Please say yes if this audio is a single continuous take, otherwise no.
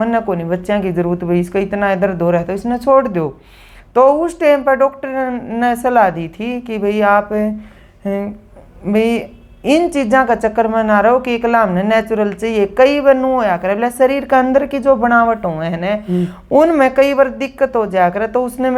yes